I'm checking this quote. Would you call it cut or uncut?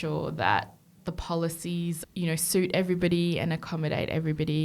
cut